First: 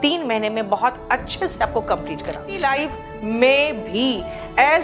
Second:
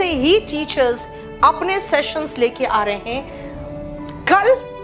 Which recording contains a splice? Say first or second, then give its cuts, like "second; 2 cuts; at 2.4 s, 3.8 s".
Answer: first; 1 cut; at 2.6 s